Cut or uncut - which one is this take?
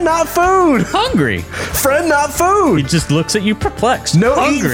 uncut